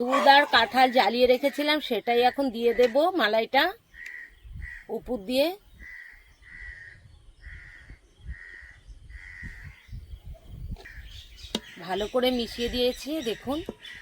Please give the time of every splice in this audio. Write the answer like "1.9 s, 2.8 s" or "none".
10.9 s